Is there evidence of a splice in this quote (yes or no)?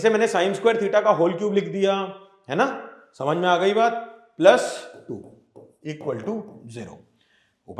no